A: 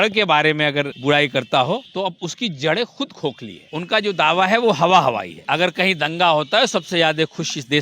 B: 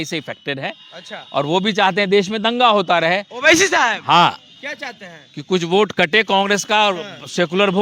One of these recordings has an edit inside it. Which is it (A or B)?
A